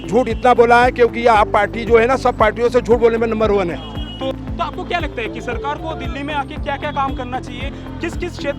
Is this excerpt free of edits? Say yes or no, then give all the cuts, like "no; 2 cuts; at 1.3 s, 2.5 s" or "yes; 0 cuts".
yes; 0 cuts